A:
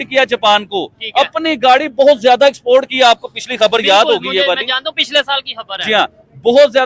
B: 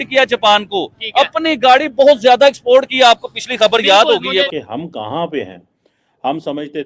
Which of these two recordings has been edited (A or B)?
B